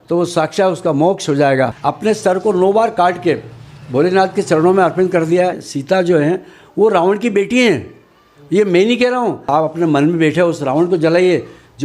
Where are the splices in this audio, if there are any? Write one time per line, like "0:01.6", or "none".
0:01.7
0:05.7
0:09.4